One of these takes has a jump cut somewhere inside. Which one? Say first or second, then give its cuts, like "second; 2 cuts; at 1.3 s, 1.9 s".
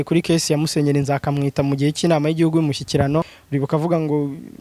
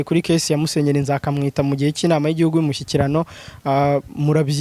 first; 1 cut; at 3.4 s